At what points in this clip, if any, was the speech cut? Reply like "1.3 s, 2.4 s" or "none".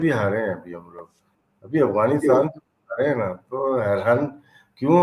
none